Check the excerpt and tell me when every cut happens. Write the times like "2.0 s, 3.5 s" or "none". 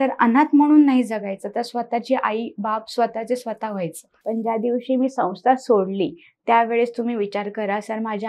4.1 s